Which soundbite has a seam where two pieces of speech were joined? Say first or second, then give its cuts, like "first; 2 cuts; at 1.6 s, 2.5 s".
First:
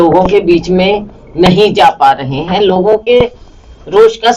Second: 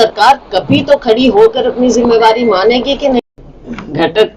second; 1 cut; at 3.2 s